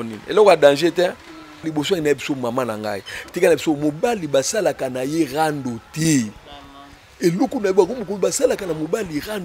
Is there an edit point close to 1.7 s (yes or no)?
yes